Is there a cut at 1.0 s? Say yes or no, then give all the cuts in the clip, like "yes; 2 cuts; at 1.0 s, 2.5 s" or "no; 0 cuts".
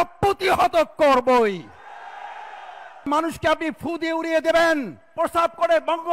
no; 2 cuts; at 3.1 s, 5.1 s